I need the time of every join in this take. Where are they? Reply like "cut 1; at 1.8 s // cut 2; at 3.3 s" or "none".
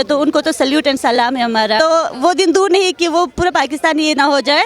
cut 1; at 1.8 s

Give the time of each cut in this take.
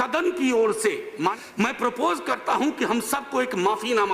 cut 1; at 1.3 s

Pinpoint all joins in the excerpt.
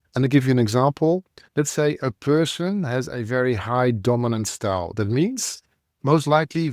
cut 1; at 1.4 s

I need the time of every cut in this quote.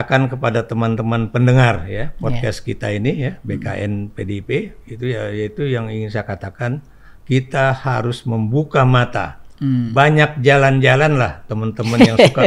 none

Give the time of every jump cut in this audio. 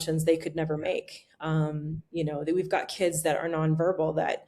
none

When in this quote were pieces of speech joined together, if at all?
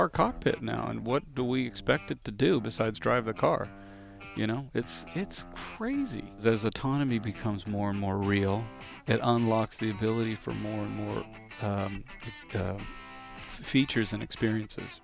cut 1; at 6.4 s

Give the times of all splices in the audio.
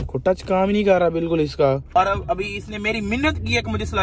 cut 1; at 1.9 s

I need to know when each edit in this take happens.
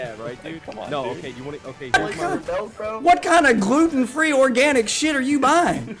cut 1; at 1.9 s

